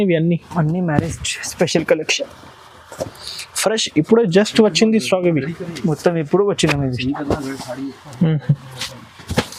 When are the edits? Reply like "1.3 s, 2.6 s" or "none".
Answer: none

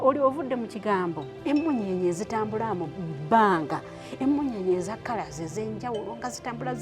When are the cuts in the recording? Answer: 1.3 s

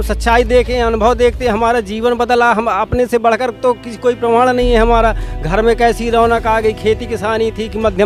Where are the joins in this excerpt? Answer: none

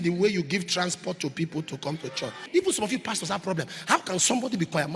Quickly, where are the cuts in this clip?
2.4 s

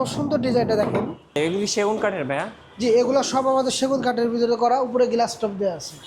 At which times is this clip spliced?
1.3 s

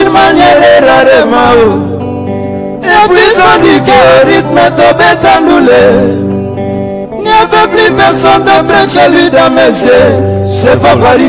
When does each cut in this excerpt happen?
none

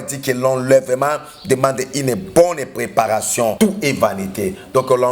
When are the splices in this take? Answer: 3.6 s

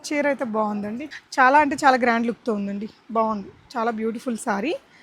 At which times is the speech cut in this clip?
1.1 s

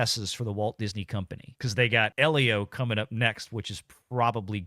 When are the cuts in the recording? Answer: 2.1 s

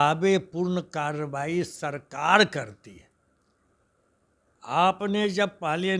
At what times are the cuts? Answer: none

